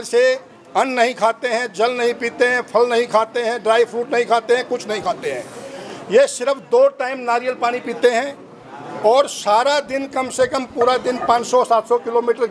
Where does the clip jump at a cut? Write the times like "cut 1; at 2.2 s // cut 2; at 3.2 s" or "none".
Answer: none